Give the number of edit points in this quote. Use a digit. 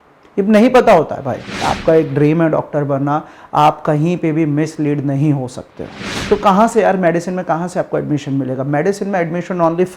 2